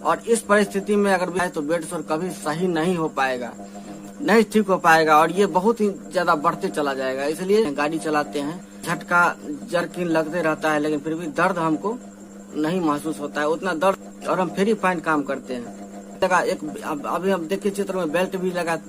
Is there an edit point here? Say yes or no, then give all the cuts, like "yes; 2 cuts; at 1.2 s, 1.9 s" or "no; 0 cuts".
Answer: yes; 5 cuts; at 1.4 s, 7.7 s, 8.8 s, 14.0 s, 16.2 s